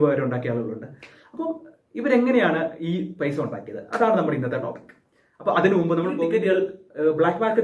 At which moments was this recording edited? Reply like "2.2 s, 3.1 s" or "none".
6.2 s